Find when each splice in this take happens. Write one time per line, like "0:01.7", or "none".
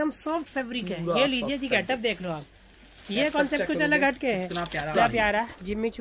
0:04.9